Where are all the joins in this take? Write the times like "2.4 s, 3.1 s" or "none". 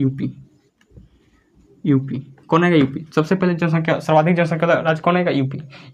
none